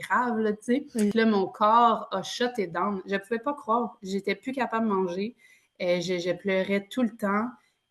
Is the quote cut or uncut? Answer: cut